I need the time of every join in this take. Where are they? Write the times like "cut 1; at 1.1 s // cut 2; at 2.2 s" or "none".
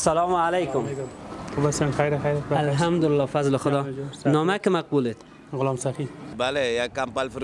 cut 1; at 6.3 s

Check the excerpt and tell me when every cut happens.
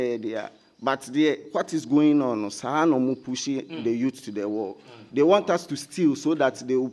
none

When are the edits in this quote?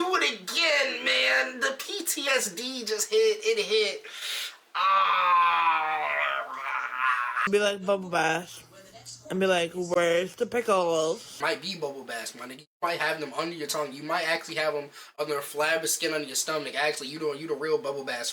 cut 1; at 7.5 s // cut 2; at 11.4 s

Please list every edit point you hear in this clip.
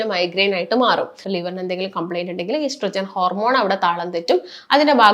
cut 1; at 1.2 s

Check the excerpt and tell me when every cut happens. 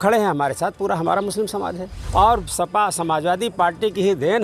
cut 1; at 1.9 s

